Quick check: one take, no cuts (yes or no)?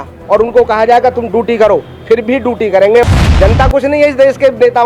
no